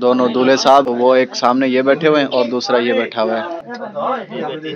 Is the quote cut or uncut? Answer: cut